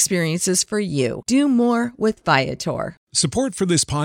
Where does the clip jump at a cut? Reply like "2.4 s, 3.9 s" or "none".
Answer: 3.0 s

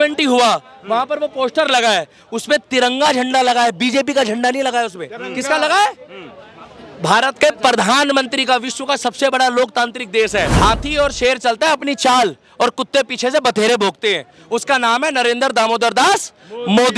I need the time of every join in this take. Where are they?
10.5 s

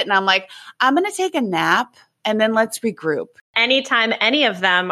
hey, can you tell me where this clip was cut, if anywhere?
3.4 s

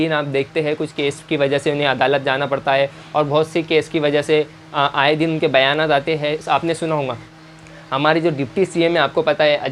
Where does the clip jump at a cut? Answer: 7.3 s

